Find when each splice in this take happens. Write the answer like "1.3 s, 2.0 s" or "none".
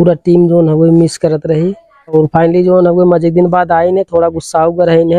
2.1 s